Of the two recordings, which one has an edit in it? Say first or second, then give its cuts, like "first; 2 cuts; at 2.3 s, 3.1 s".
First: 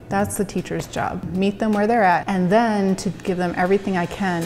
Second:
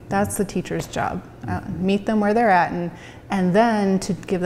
first; 2 cuts; at 1.2 s, 2.2 s